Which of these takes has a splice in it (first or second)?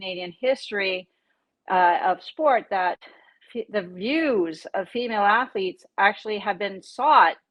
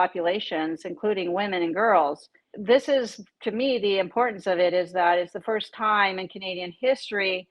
second